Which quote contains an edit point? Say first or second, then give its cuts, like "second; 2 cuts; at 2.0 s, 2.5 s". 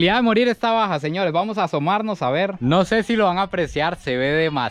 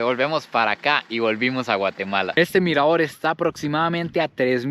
second; 1 cut; at 2.3 s